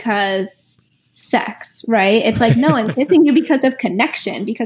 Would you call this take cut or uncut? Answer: uncut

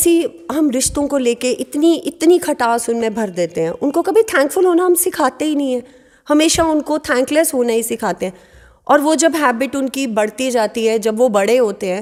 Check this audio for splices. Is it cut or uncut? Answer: uncut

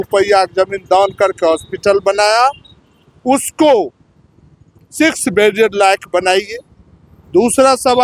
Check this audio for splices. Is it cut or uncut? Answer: uncut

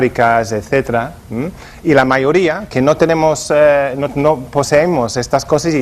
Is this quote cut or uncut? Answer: uncut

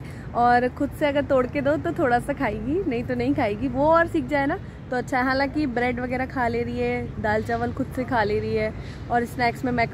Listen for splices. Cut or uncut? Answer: uncut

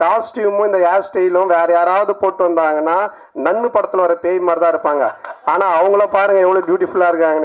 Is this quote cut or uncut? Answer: uncut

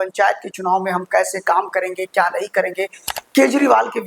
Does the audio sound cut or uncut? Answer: uncut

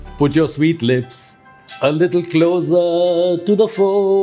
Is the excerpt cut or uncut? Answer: uncut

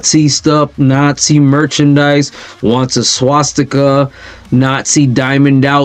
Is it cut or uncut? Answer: uncut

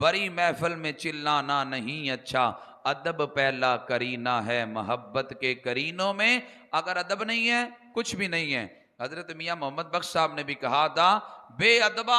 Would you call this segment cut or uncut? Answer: uncut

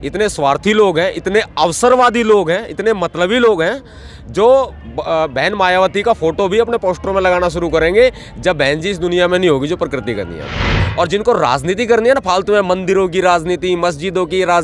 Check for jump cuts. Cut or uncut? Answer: cut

